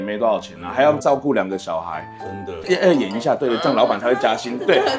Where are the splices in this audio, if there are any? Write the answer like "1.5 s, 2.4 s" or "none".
none